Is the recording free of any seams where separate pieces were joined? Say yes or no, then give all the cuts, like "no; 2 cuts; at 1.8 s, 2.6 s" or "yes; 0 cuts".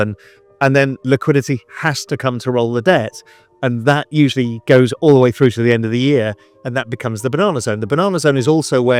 yes; 0 cuts